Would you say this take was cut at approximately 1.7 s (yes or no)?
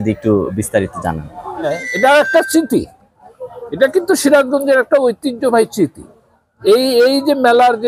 yes